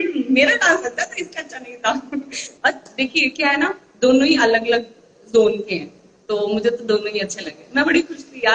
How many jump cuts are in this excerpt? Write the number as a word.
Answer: one